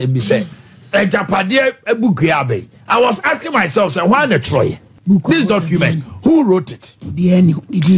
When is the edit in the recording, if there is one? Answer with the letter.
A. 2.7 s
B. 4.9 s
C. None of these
B